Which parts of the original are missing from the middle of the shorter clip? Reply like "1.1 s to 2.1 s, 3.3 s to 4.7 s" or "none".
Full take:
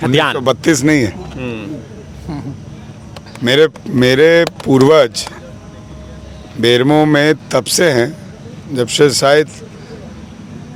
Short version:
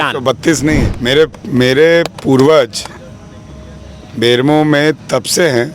1.1 s to 3.3 s

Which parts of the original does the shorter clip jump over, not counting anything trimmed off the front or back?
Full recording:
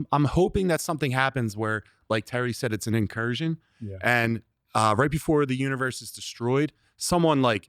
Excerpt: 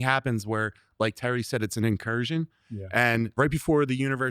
4.5 s to 5.0 s

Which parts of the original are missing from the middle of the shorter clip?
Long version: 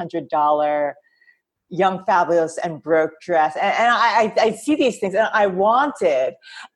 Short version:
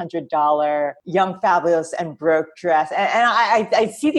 1.0 s to 1.6 s

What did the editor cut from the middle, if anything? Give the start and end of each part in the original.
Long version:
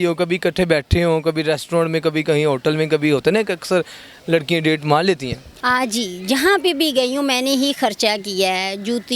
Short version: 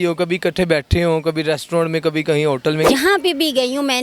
2.9 s to 6.3 s

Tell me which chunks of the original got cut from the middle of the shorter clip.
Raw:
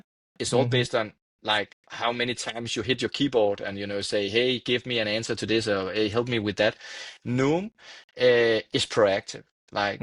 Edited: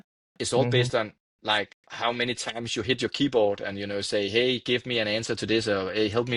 none

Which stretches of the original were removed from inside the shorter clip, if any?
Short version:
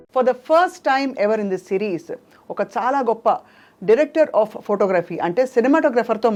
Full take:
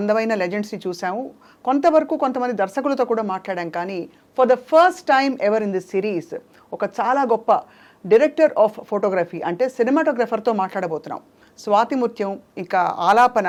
none

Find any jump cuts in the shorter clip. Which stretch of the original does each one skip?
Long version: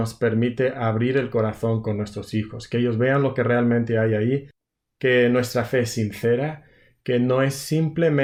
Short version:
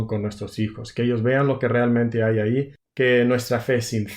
4.6 s to 4.8 s

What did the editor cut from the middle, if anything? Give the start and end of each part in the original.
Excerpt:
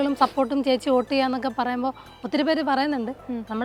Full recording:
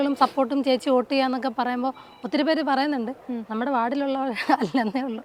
none

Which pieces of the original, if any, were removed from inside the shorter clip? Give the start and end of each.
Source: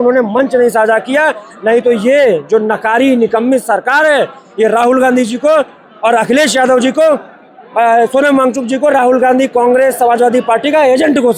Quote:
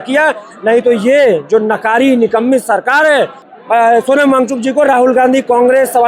4.4 s to 7.5 s

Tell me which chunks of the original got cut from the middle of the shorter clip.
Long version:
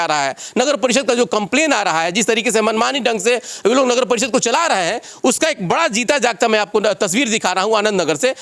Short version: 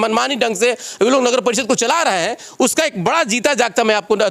none

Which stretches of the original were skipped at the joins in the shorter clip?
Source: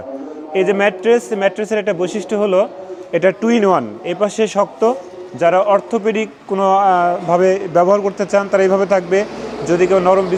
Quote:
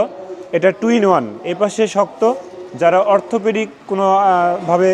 none

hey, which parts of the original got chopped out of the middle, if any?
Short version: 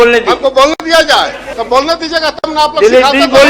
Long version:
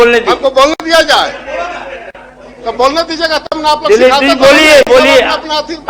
1.4 s to 2.5 s

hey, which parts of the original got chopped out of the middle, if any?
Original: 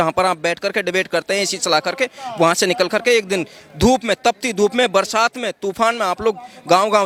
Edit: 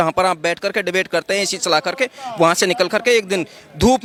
none

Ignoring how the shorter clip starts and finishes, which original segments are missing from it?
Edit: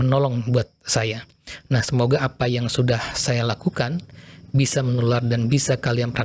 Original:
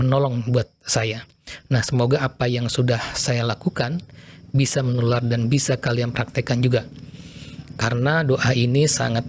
none

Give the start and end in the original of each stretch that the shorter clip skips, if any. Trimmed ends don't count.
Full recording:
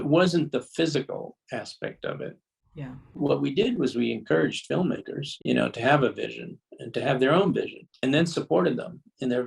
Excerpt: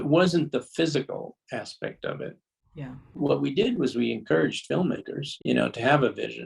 none

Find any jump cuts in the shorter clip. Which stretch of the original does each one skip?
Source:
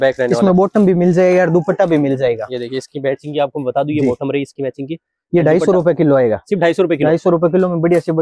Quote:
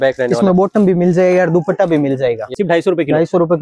2.5 s to 6.4 s

